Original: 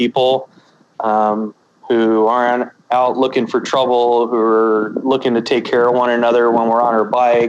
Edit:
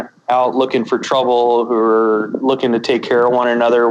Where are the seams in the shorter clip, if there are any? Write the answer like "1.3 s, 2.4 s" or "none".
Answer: none